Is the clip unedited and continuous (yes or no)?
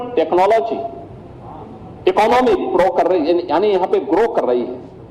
yes